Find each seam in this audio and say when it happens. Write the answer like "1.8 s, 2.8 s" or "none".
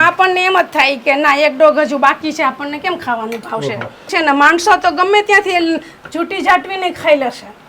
4.1 s